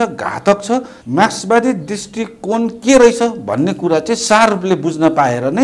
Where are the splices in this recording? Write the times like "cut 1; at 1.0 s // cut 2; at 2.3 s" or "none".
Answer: cut 1; at 1.0 s